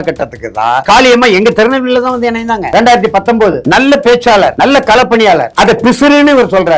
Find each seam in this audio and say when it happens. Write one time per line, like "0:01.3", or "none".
0:00.8
0:02.6
0:03.6
0:04.5
0:05.5